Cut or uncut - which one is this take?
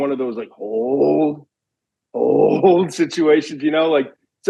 uncut